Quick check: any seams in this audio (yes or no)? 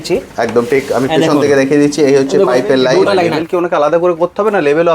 yes